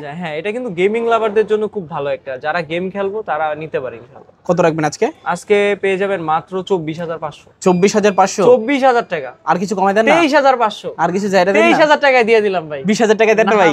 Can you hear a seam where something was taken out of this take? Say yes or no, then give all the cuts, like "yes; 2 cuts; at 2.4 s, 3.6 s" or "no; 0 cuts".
no; 0 cuts